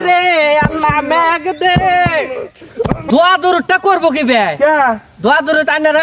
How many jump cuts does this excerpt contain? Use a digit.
1